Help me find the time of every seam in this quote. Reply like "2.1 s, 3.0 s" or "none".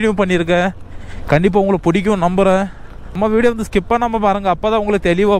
3.2 s